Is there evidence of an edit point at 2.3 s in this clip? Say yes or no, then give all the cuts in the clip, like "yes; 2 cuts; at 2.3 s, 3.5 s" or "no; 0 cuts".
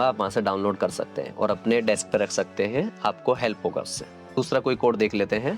no; 1 cut; at 4.4 s